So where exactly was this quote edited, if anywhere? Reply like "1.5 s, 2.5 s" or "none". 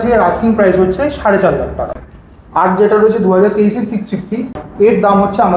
1.9 s, 4.6 s